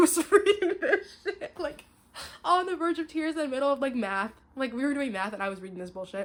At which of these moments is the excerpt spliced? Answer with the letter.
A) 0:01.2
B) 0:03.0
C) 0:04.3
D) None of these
D